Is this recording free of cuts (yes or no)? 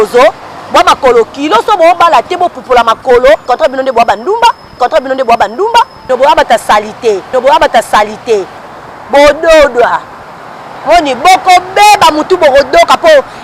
yes